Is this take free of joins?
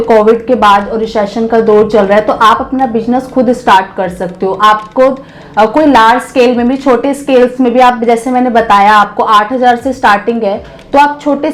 yes; 0 cuts

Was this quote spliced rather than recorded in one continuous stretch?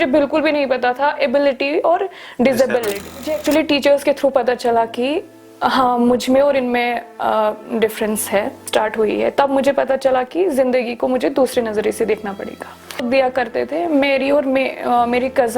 yes; 3 cuts; at 3.3 s, 8.6 s, 13.0 s

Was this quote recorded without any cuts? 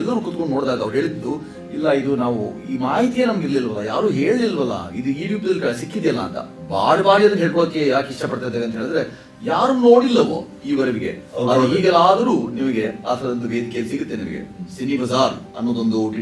yes; 0 cuts

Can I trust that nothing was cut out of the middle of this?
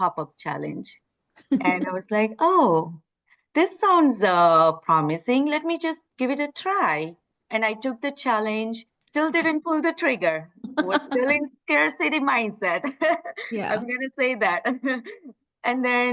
yes; 0 cuts

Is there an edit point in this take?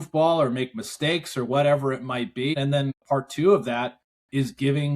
yes; 1 cut; at 2.7 s

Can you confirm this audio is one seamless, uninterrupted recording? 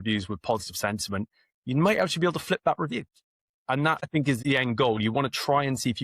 no; 1 cut; at 4.1 s

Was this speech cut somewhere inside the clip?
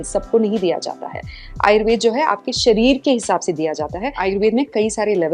yes; 1 cut; at 4.1 s

